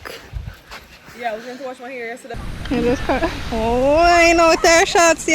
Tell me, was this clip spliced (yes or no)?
yes